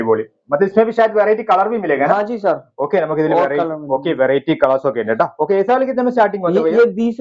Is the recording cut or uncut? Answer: uncut